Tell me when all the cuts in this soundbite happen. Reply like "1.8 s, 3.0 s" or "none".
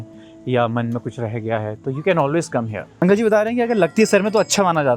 3.0 s